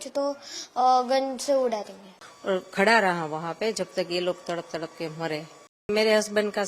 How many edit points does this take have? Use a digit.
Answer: 2